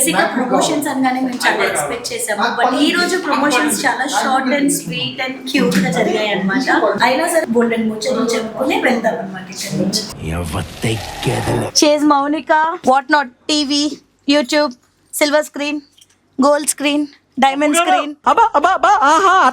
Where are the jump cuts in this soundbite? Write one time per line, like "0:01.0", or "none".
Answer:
0:07.3
0:10.1
0:11.7
0:12.8